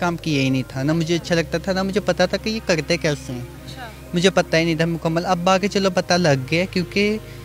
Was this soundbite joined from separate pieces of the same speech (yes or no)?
no